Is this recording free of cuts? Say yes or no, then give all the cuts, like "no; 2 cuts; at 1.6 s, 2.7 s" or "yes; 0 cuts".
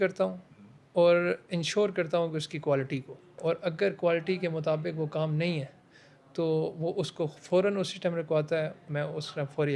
no; 2 cuts; at 3.4 s, 8.8 s